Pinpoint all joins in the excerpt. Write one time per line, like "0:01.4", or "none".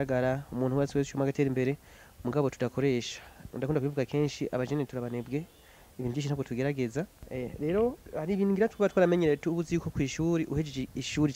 0:07.2
0:08.1